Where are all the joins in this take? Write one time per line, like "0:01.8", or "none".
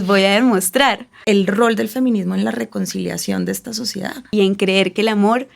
0:01.2
0:04.2